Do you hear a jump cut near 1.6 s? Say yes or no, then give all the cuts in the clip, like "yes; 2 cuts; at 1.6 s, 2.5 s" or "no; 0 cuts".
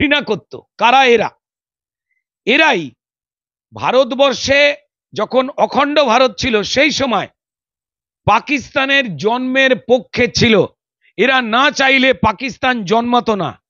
no; 0 cuts